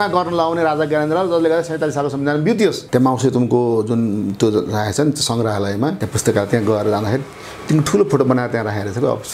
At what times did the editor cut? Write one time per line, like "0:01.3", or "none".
0:02.8
0:06.1